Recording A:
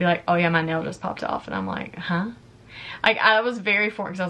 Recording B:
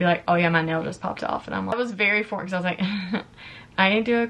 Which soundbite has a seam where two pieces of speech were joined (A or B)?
B